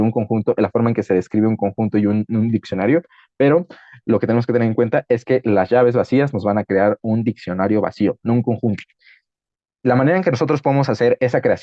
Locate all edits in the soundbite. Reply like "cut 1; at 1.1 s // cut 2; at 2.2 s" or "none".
none